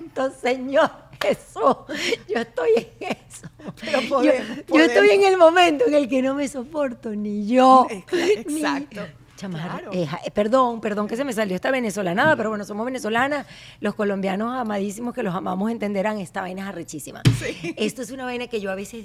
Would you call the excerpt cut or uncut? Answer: uncut